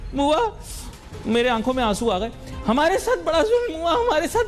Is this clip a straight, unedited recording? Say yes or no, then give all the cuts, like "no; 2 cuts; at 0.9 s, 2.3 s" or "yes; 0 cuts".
yes; 0 cuts